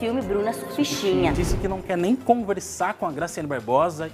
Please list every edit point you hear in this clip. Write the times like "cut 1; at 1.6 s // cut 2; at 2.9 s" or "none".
cut 1; at 1.3 s